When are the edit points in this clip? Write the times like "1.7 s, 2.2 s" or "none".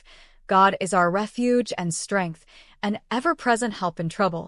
3.0 s